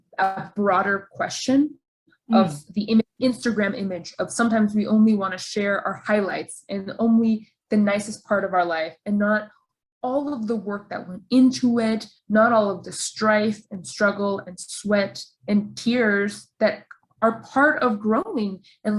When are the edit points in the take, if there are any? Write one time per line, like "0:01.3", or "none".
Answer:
none